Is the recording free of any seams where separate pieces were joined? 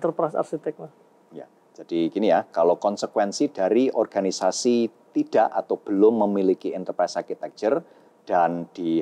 yes; 0 cuts

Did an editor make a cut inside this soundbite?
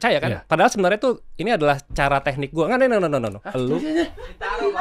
yes; 1 cut; at 3.4 s

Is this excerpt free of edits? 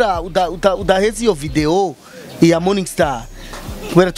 yes; 0 cuts

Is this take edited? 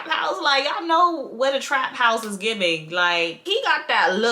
yes; 1 cut; at 3.4 s

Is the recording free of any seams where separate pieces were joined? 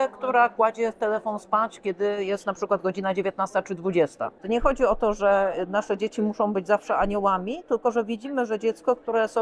no; 1 cut; at 4.3 s

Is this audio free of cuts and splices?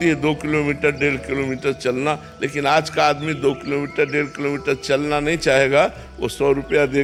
yes; 0 cuts

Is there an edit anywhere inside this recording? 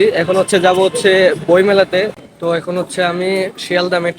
yes; 1 cut; at 2.2 s

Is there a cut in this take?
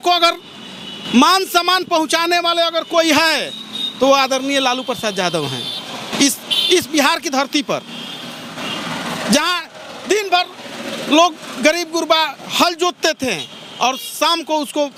no; 0 cuts

